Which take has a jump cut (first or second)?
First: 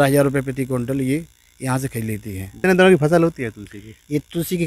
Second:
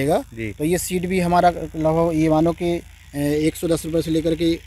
first